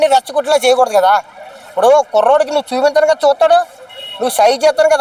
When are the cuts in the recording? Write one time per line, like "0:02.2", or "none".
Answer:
none